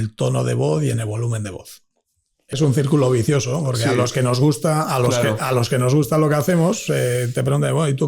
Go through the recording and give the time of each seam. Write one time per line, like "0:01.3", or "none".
0:02.6